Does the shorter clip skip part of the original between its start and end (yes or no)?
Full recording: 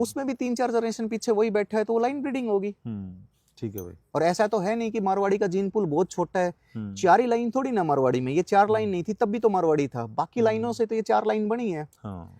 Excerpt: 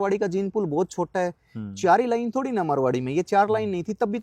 no